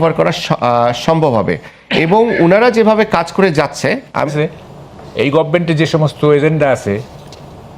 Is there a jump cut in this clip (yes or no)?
yes